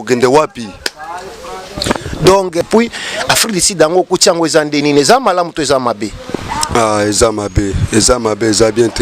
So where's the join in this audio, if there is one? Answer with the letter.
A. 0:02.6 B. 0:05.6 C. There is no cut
A